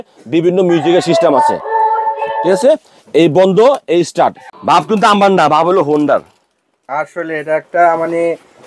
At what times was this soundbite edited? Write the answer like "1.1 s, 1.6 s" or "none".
4.5 s